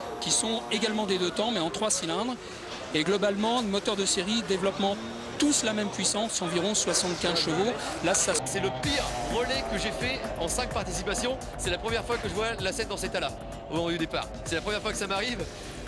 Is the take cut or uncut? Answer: cut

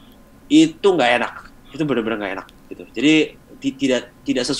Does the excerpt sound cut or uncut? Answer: uncut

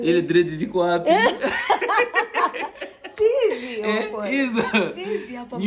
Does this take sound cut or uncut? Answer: uncut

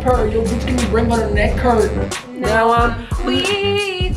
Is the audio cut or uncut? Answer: cut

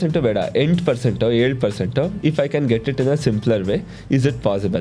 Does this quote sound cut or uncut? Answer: cut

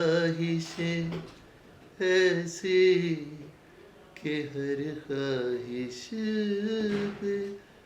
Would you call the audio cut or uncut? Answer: uncut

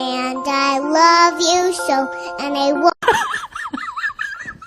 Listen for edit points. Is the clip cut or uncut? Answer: cut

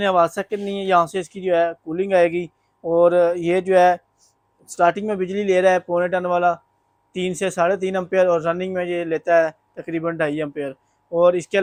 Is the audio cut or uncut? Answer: uncut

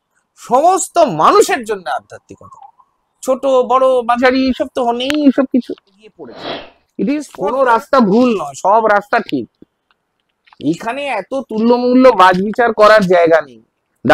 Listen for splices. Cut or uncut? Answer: cut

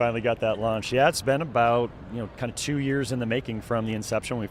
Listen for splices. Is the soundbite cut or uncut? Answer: uncut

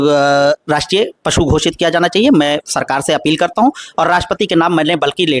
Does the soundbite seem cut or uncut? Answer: uncut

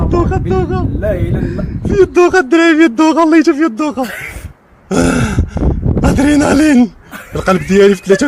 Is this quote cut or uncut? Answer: uncut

